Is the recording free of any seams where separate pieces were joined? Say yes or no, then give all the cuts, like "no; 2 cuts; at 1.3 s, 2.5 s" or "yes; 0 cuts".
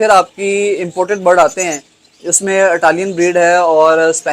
yes; 0 cuts